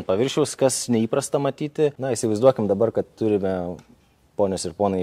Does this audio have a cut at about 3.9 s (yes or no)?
no